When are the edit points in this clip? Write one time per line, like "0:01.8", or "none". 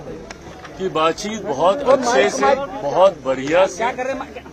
none